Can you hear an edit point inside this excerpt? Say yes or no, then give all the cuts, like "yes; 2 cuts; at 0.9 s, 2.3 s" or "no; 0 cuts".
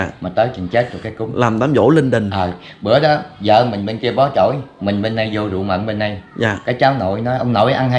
no; 0 cuts